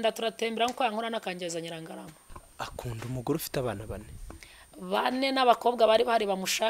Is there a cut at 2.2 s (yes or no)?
yes